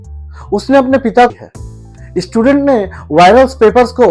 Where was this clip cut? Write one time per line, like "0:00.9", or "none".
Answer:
0:01.3